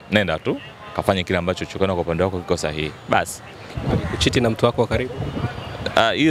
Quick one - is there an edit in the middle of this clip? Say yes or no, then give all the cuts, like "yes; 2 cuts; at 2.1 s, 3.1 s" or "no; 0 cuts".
no; 0 cuts